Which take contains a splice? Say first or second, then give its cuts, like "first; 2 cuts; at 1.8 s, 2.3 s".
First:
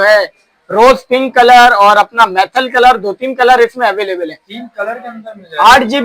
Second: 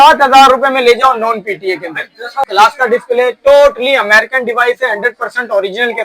second; 1 cut; at 2.5 s